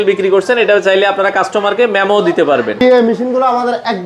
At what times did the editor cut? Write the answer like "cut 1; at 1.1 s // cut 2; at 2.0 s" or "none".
cut 1; at 2.8 s